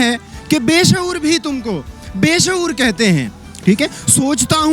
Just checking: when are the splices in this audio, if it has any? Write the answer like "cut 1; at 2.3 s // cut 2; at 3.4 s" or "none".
none

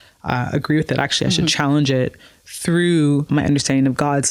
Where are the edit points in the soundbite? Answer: cut 1; at 3.3 s

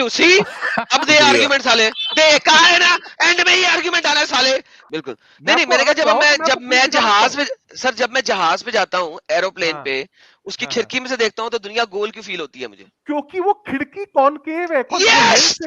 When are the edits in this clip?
cut 1; at 4.8 s

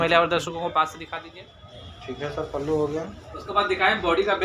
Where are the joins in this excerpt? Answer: cut 1; at 2.0 s

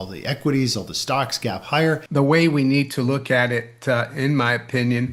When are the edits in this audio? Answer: cut 1; at 2.0 s

